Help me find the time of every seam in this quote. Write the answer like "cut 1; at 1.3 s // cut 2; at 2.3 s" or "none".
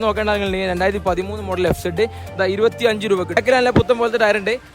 cut 1; at 3.4 s